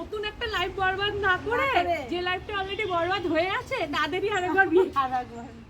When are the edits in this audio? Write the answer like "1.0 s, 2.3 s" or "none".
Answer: none